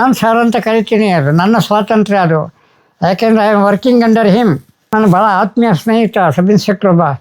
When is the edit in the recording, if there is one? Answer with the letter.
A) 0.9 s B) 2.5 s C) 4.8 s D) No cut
C